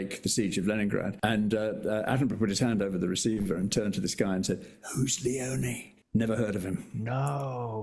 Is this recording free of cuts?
no; 1 cut; at 6.9 s

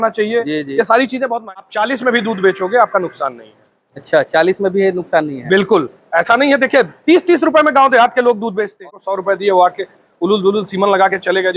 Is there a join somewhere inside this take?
yes; 2 cuts; at 1.4 s, 8.8 s

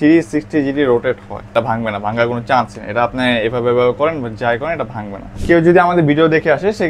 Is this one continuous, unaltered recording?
no; 2 cuts; at 1.5 s, 5.3 s

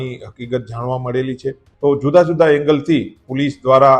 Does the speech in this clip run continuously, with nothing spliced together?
no; 1 cut; at 1.7 s

